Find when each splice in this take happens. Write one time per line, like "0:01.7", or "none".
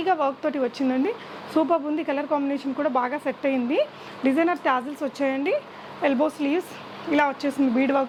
none